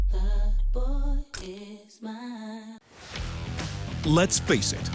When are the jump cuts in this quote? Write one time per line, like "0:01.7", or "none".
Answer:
0:02.7